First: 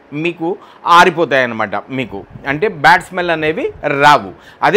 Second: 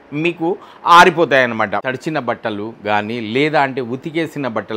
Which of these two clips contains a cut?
second; 1 cut; at 1.8 s

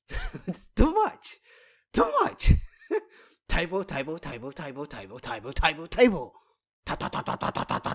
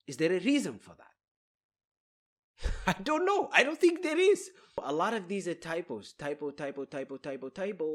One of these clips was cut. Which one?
second; 1 cut; at 4.8 s

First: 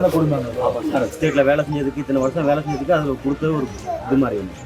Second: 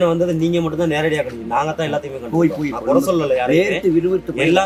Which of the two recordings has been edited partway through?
first; 1 cut; at 1.1 s

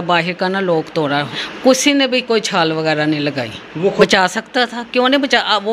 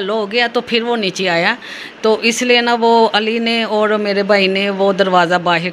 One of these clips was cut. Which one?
first; 2 cuts; at 1.4 s, 4.0 s

